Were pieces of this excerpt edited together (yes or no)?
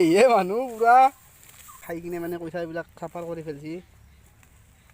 yes